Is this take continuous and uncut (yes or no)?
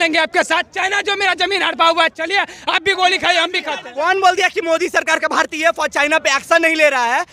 no